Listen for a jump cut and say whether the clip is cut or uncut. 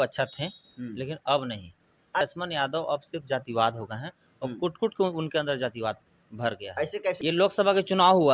cut